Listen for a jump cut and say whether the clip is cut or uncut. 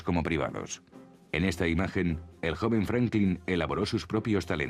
cut